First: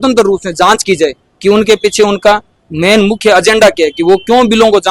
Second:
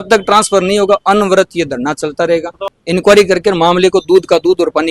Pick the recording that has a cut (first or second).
second